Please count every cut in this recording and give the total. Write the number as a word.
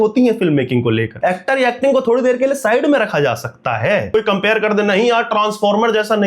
two